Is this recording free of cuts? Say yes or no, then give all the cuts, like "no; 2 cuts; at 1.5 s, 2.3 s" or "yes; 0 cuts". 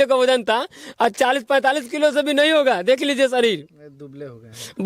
yes; 0 cuts